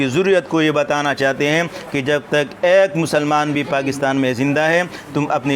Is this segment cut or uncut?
uncut